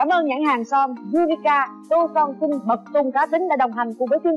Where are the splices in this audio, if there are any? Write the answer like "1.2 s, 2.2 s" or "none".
1.0 s

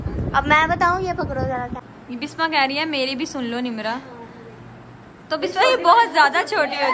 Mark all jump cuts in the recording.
none

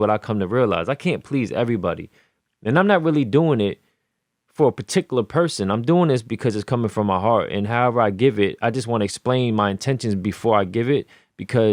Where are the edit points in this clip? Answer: none

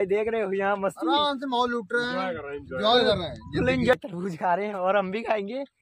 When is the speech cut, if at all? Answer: 3.9 s

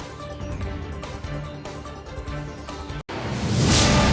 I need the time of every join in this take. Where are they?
none

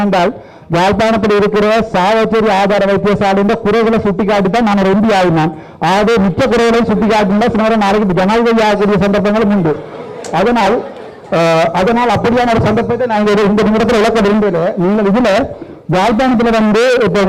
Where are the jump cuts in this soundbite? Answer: none

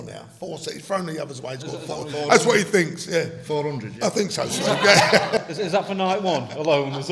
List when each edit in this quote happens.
none

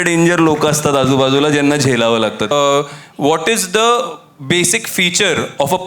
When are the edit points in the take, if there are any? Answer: 2.5 s

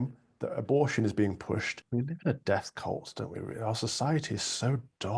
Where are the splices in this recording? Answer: 1.8 s

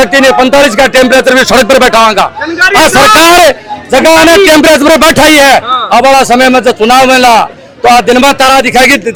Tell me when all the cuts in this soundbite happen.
none

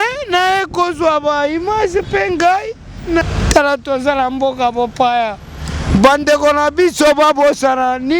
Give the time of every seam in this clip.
3.2 s

